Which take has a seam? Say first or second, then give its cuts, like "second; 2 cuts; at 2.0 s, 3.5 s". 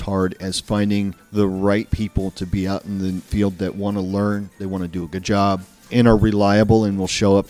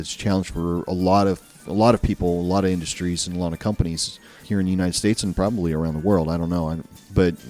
first; 3 cuts; at 1.2 s, 3.2 s, 5.8 s